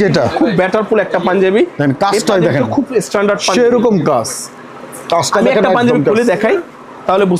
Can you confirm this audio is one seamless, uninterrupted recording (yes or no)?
yes